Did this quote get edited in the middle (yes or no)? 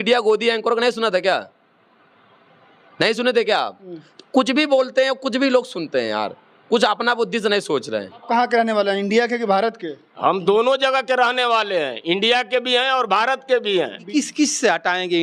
yes